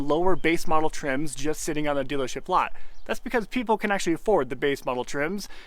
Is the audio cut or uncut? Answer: uncut